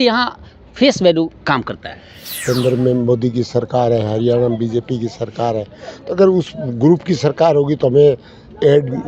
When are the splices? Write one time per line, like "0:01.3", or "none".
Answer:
0:02.4